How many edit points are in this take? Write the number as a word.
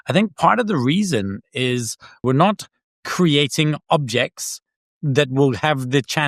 one